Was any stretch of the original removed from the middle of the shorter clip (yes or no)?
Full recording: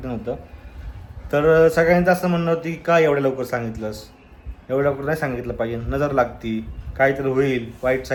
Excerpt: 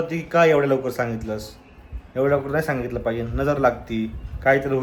no